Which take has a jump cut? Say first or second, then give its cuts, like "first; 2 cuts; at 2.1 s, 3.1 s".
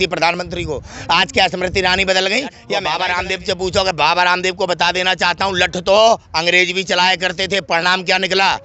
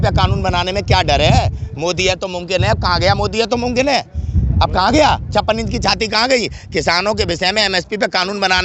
first; 1 cut; at 2.7 s